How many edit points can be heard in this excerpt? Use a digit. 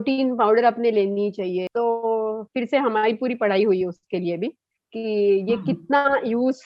1